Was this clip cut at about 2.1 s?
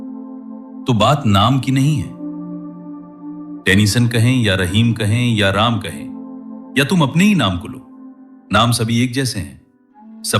yes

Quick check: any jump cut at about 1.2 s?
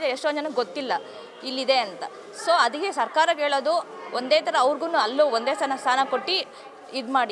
no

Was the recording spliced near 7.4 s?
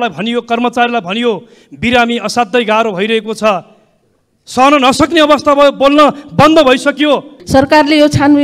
yes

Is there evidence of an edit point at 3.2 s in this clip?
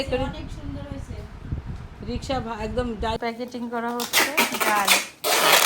yes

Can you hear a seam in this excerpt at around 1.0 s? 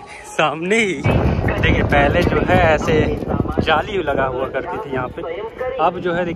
yes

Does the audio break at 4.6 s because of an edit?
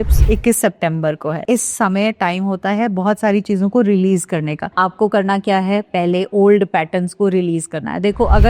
yes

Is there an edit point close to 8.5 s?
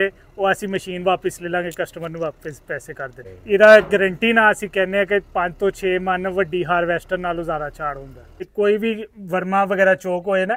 yes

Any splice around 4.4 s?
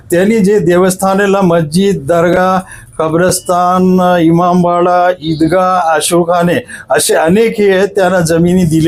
no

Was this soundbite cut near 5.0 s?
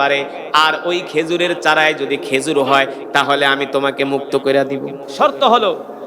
yes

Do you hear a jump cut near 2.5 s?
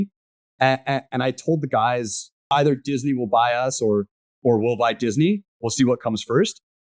yes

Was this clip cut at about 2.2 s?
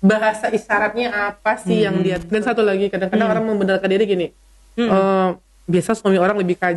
yes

